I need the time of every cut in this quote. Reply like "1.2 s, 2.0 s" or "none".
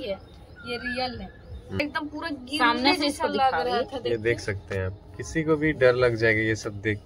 1.8 s